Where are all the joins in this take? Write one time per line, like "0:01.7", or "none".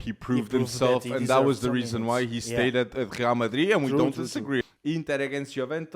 0:04.6